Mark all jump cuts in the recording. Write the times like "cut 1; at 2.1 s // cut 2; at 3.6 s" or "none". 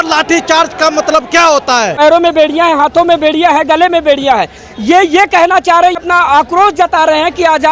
cut 1; at 2.0 s // cut 2; at 6.0 s